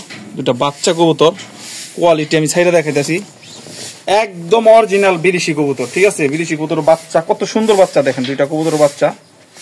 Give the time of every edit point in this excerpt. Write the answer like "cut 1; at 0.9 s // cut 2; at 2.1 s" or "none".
none

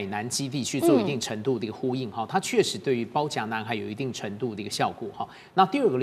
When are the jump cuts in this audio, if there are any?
none

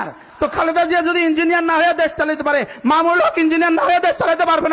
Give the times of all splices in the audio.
none

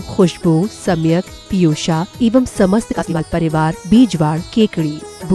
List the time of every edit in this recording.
cut 1; at 3.0 s

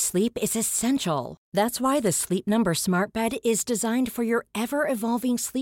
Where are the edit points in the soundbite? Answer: none

